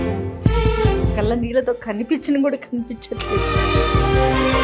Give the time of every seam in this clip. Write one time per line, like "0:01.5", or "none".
none